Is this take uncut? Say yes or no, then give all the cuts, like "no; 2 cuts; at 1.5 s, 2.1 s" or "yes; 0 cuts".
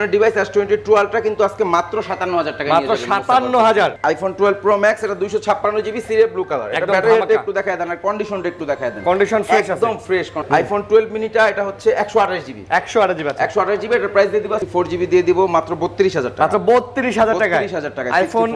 no; 3 cuts; at 4.0 s, 10.4 s, 14.6 s